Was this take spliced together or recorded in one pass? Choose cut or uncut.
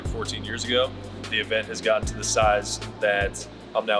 cut